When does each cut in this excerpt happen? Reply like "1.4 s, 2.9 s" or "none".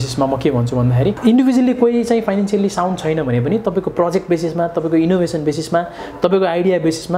1.2 s

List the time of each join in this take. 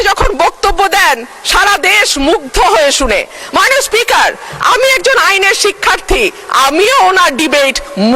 none

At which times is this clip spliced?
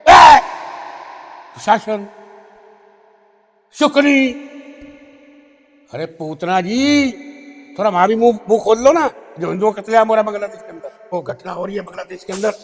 11.1 s

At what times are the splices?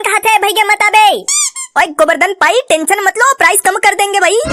none

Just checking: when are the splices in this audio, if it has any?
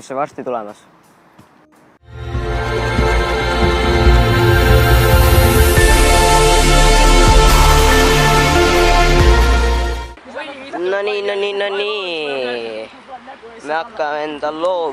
none

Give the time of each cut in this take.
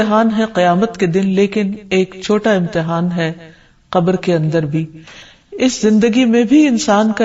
5.2 s

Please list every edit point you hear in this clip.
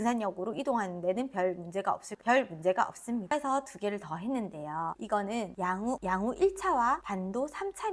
3.3 s

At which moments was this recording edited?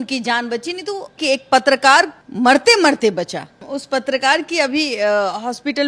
1.2 s, 2.2 s, 3.6 s

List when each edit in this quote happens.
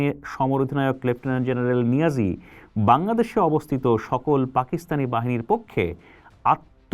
none

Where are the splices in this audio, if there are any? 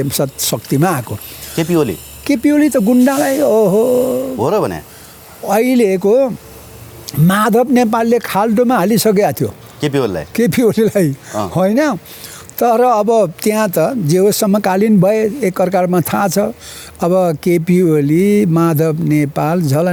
none

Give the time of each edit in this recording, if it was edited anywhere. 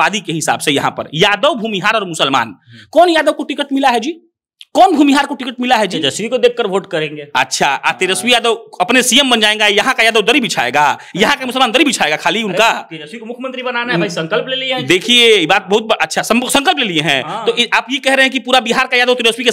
none

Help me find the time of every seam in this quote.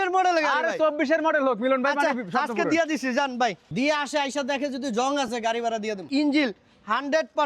3.7 s, 6.1 s

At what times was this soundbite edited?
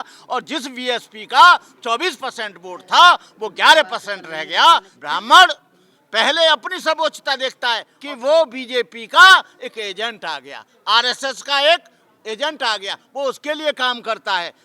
4.9 s, 7.9 s

